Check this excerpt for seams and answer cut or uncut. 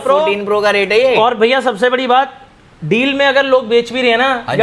uncut